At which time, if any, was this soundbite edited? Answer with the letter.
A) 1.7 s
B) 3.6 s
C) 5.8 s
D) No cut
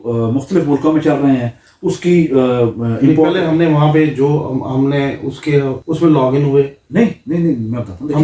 C